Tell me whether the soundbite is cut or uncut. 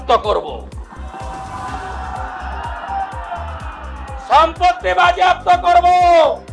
uncut